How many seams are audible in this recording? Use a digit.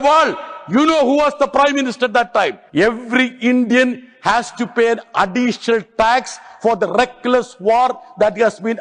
1